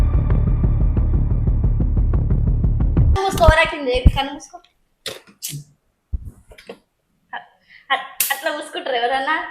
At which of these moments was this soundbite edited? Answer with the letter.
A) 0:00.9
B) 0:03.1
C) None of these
B